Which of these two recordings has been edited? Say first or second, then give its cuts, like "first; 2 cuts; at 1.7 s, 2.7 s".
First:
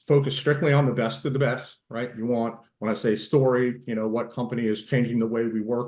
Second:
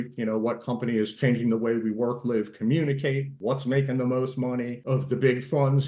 second; 2 cuts; at 3.3 s, 4.8 s